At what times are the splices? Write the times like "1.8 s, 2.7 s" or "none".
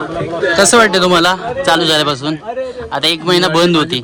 none